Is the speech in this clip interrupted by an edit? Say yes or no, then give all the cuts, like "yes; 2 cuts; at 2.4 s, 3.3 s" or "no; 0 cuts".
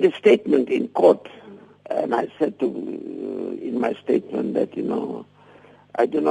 no; 0 cuts